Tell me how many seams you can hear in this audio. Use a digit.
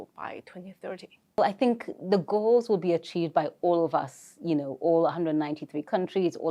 1